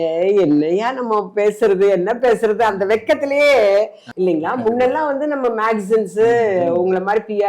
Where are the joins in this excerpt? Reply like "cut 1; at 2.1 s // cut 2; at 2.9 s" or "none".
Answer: cut 1; at 4.0 s